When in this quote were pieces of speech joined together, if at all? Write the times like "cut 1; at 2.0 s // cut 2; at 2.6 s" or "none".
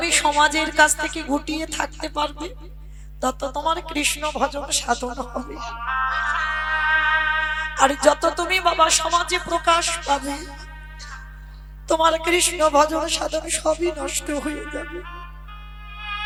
none